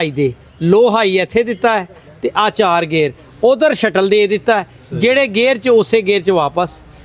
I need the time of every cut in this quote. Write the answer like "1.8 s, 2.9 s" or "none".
none